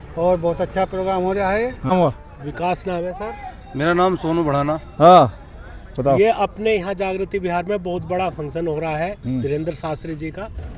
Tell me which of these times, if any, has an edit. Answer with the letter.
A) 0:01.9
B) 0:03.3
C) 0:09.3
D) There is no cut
A